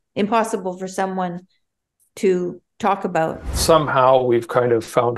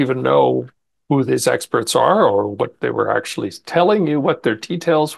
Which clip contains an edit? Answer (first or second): first